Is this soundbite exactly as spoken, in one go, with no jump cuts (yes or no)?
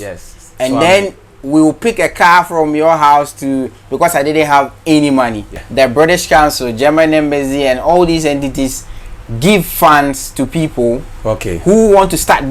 no